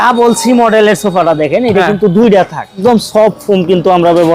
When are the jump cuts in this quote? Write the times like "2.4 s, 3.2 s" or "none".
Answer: 2.8 s